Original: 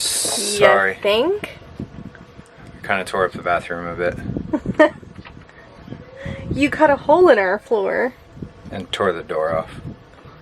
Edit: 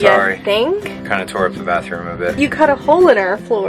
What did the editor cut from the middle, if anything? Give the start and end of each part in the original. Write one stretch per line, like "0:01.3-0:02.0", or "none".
0:01.5-0:02.7
0:04.1-0:06.6